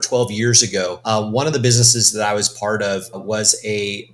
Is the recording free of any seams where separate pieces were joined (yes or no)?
no